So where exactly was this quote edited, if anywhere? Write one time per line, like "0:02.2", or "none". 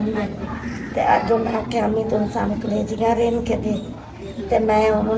none